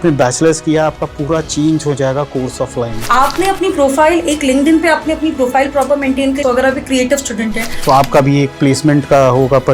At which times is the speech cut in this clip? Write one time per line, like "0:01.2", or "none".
0:03.0
0:06.4
0:07.7